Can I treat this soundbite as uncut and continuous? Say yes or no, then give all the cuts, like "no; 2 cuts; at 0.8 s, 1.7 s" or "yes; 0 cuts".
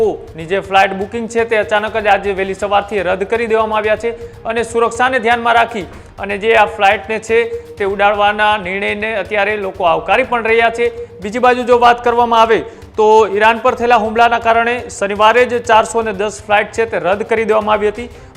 yes; 0 cuts